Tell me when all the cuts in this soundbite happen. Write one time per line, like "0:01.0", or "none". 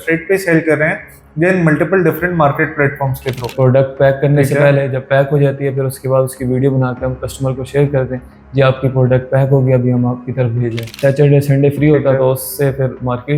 0:03.4
0:10.9